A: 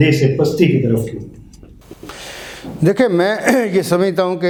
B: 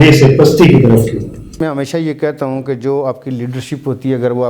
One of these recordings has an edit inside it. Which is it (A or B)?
B